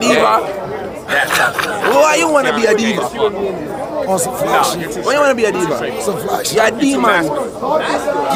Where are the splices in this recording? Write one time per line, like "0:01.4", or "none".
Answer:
none